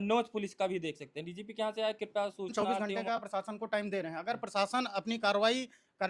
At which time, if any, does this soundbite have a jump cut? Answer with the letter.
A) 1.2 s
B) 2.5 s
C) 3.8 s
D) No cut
B